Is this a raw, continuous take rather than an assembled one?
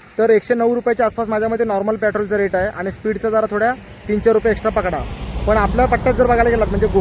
yes; 0 cuts

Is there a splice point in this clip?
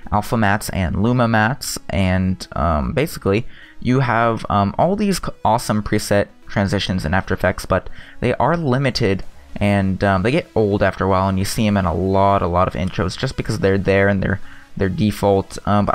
yes; 1 cut; at 8.0 s

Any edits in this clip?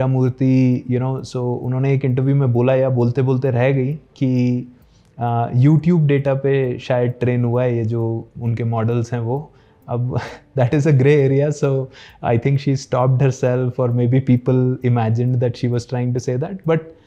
no; 0 cuts

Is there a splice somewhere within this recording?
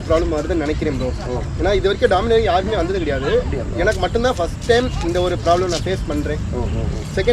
no; 0 cuts

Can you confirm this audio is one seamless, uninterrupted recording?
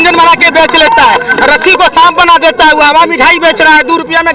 yes; 0 cuts

